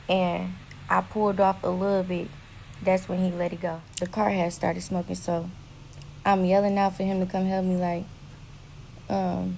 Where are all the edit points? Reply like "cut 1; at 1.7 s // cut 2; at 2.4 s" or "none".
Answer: cut 1; at 3.8 s